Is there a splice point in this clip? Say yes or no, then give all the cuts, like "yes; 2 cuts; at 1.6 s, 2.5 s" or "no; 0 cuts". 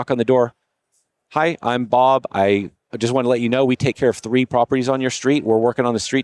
no; 0 cuts